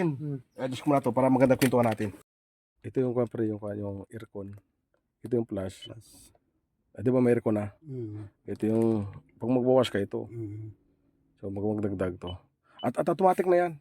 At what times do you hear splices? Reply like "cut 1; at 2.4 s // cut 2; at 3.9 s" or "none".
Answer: cut 1; at 2.2 s